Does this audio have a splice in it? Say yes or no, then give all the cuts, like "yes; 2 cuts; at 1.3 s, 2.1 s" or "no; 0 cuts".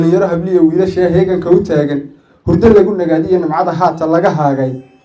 no; 0 cuts